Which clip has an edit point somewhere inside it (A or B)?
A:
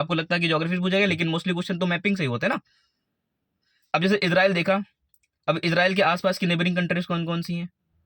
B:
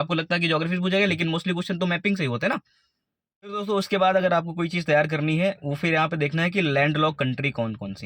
B